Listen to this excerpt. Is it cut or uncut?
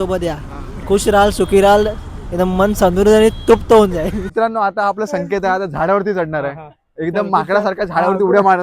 cut